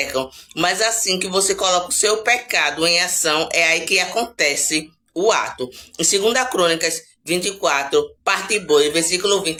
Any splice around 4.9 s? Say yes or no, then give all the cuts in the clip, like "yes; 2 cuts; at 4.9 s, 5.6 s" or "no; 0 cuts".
no; 0 cuts